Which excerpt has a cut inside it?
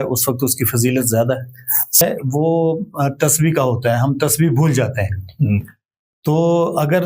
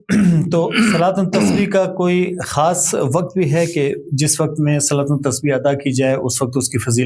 first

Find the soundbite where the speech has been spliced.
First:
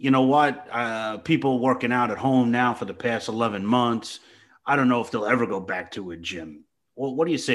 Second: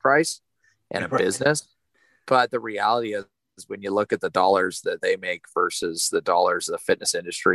second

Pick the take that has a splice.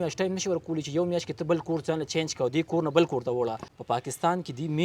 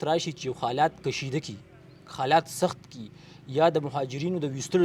first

